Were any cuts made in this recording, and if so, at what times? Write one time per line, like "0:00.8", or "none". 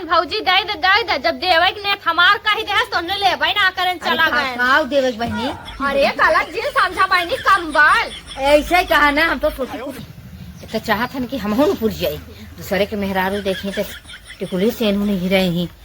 0:10.0